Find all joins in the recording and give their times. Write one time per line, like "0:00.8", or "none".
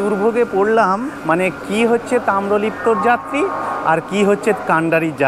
0:01.1

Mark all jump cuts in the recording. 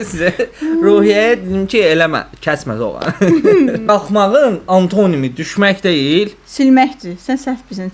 0:03.7

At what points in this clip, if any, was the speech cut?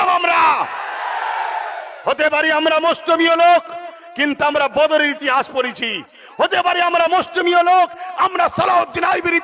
none

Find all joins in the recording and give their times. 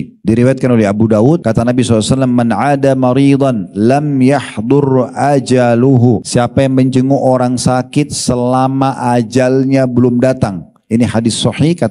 0:01.4
0:06.3

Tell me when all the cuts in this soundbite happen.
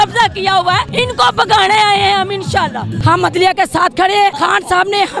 0:00.9
0:02.9
0:04.4

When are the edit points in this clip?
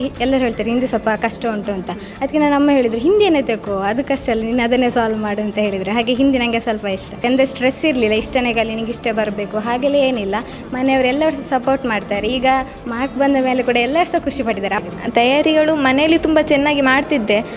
0:07.2
0:14.9

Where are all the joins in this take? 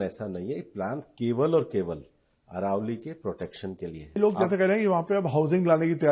0:04.2

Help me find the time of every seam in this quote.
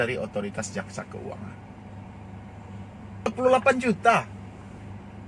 0:03.3

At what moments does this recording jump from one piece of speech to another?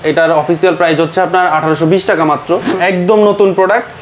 0:02.7

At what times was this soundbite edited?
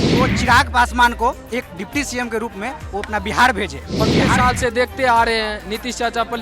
0:04.3

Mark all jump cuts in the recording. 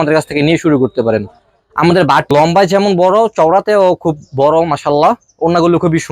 0:02.3

